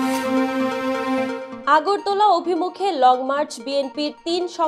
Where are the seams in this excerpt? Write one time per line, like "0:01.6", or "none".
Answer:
0:01.5